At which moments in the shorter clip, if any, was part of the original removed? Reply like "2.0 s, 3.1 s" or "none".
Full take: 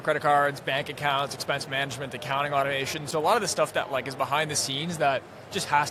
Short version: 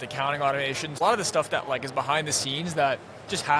1.0 s